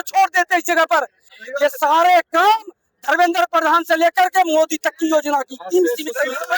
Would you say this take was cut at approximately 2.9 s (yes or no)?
no